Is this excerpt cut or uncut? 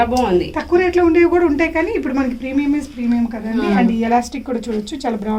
uncut